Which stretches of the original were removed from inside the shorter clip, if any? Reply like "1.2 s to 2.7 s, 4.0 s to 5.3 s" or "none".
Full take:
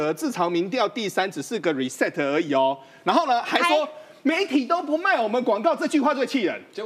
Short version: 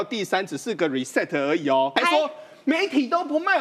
2.8 s to 3.5 s